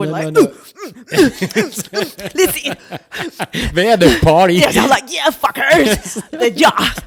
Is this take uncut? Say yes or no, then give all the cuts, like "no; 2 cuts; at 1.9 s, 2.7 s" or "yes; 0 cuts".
yes; 0 cuts